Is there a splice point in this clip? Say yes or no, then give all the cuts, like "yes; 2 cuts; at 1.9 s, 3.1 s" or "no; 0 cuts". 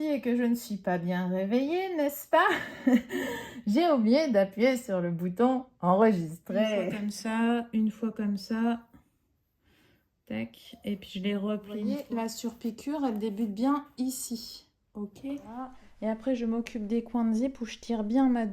yes; 3 cuts; at 7.0 s, 12.0 s, 15.7 s